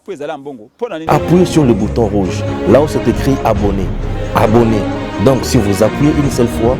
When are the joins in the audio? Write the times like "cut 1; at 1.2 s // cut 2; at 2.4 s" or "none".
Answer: cut 1; at 1.0 s